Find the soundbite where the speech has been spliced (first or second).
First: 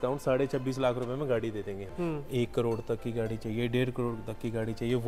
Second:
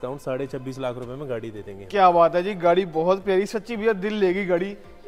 first